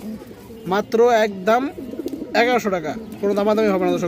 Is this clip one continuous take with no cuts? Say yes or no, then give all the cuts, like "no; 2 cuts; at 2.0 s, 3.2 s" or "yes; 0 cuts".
yes; 0 cuts